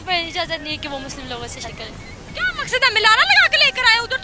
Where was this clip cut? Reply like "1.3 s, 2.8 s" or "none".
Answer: 1.7 s